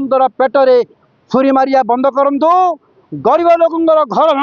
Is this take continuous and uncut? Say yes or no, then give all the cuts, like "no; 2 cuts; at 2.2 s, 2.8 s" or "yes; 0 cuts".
yes; 0 cuts